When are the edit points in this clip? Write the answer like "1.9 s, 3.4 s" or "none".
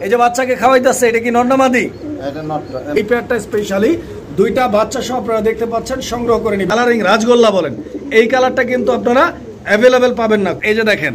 2.9 s, 6.7 s, 10.2 s